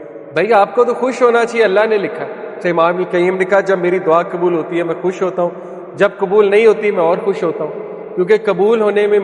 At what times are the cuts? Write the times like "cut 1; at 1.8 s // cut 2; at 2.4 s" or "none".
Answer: cut 1; at 2.6 s